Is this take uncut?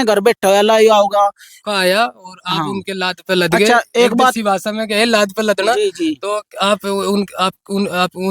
no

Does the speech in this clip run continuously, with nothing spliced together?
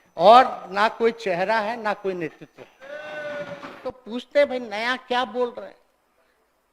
no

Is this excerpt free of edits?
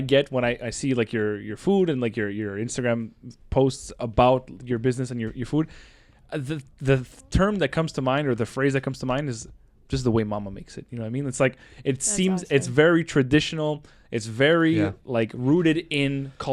yes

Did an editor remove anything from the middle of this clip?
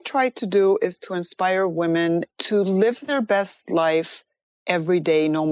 yes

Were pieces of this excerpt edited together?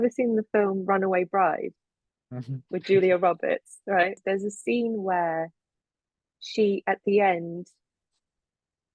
yes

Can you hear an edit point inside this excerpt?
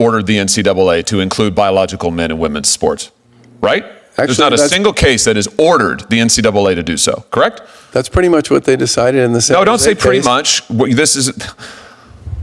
no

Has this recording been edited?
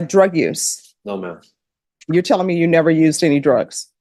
no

